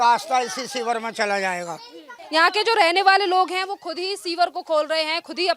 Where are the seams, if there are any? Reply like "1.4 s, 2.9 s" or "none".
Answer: 2.1 s